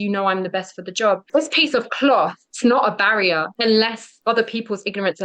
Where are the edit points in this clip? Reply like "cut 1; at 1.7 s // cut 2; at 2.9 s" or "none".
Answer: cut 1; at 1.2 s // cut 2; at 2.4 s // cut 3; at 3.5 s // cut 4; at 4.1 s

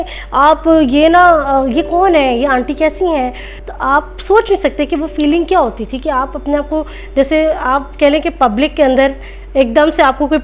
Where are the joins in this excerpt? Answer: cut 1; at 3.5 s

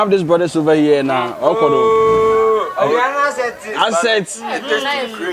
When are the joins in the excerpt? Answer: none

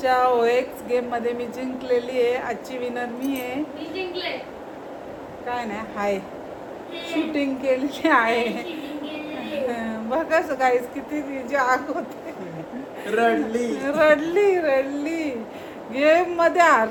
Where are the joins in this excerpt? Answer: none

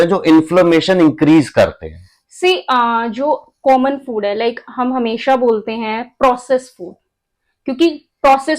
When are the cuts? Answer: none

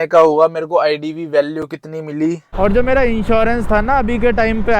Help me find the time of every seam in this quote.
cut 1; at 2.5 s

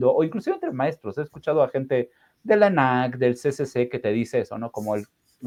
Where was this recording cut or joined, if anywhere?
none

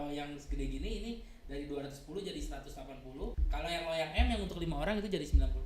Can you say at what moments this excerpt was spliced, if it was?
cut 1; at 3.4 s

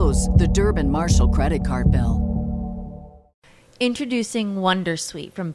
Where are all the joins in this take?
cut 1; at 3.4 s

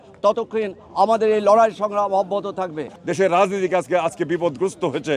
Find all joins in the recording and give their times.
cut 1; at 2.8 s

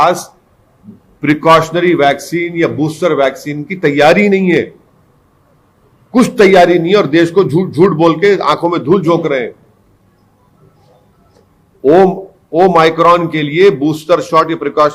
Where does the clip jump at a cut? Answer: none

